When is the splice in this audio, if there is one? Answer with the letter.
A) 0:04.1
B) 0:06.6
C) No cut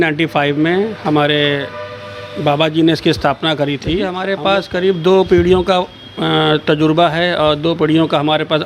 A